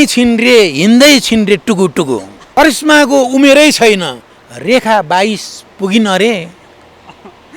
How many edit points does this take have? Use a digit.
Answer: 1